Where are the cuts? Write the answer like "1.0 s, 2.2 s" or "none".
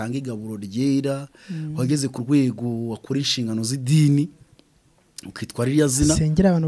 none